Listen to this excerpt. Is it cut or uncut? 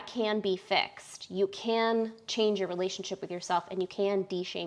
uncut